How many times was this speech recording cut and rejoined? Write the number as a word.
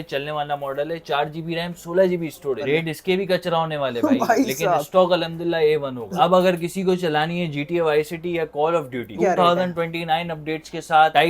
three